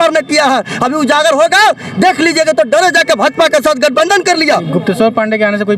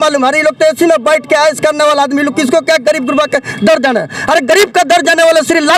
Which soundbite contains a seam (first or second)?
first